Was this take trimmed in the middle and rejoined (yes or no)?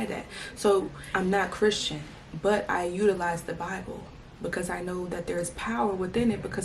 yes